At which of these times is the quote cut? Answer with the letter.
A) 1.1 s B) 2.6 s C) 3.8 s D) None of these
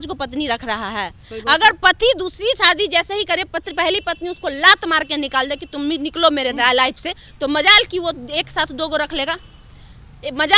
D